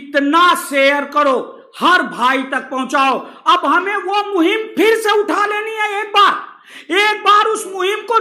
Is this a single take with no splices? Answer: yes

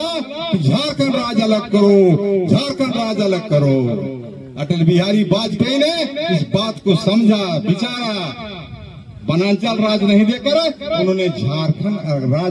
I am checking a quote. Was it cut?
no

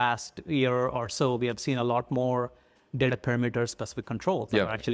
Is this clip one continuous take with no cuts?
yes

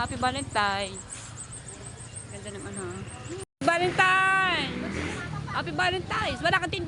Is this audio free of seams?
no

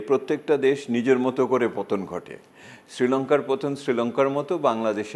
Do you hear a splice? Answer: no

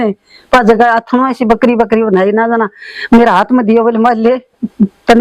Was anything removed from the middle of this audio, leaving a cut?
no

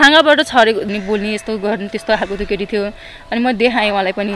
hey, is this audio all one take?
no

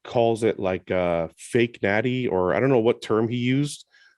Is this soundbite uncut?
yes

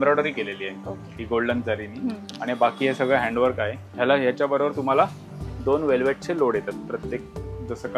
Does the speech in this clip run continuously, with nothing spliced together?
no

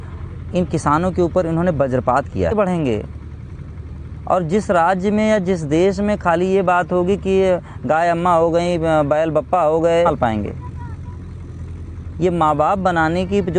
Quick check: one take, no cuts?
no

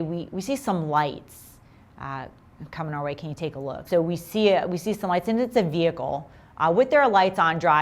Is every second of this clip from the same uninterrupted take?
no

